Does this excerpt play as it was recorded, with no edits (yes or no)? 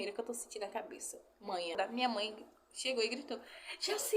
no